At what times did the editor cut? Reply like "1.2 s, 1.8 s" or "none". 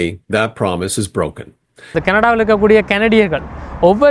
2.0 s